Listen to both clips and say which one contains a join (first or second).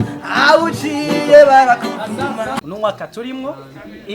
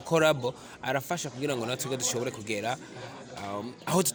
first